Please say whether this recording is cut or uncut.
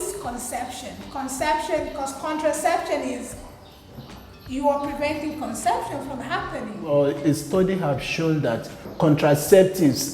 cut